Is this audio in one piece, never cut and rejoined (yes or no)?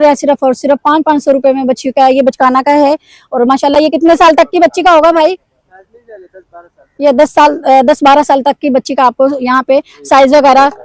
yes